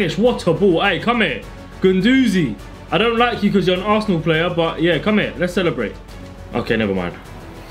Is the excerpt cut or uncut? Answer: uncut